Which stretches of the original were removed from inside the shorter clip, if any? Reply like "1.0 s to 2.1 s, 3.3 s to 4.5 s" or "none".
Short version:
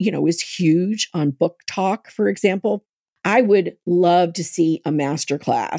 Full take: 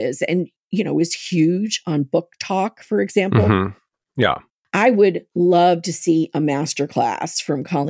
3.5 s to 4.3 s